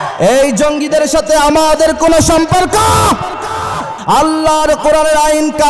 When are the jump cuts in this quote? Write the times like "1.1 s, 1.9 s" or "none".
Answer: 4.0 s